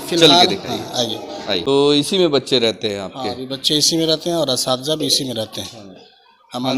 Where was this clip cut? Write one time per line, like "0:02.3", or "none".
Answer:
0:01.6